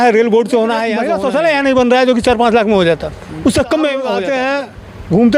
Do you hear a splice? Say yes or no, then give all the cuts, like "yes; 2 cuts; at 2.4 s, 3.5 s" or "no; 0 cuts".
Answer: yes; 2 cuts; at 1.1 s, 4.3 s